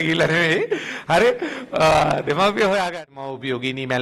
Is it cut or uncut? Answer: cut